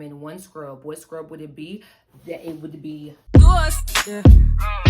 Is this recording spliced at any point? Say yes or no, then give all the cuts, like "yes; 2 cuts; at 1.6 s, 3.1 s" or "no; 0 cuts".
yes; 1 cut; at 3.2 s